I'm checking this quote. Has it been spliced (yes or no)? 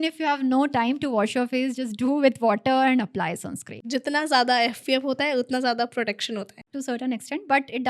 yes